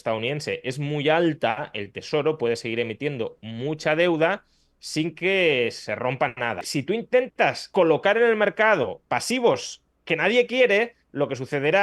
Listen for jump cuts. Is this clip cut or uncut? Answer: cut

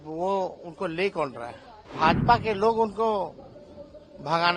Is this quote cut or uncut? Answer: cut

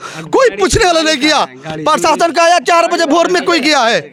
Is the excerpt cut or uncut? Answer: uncut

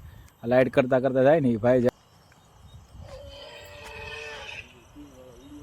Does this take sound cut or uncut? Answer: cut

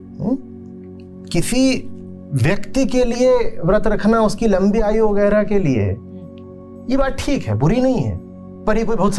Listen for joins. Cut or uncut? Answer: uncut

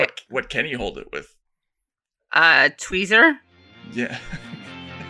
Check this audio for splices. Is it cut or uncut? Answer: uncut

